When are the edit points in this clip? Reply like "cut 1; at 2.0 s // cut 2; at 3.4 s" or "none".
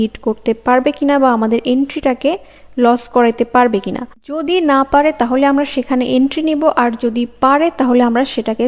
none